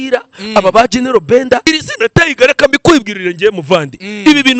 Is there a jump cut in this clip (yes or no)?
yes